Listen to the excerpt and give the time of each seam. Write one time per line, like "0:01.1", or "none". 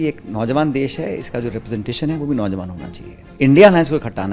0:03.3